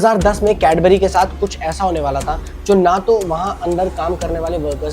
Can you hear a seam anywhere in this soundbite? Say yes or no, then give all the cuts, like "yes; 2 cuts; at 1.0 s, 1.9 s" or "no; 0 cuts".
no; 0 cuts